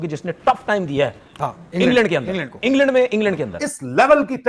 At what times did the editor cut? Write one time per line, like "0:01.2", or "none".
0:03.6